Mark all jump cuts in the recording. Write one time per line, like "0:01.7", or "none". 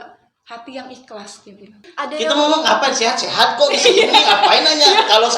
0:01.8